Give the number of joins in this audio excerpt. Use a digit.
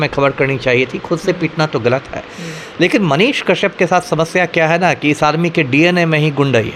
0